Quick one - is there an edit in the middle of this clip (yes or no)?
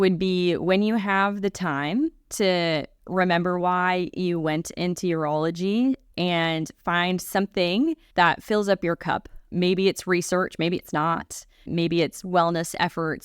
yes